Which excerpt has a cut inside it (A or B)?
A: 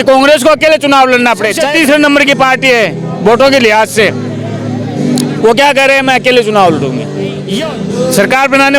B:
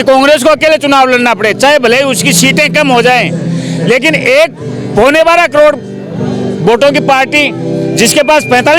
A